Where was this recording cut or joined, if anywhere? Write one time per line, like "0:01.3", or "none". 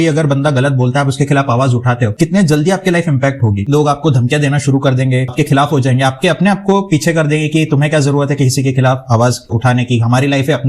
0:02.1
0:03.7
0:05.3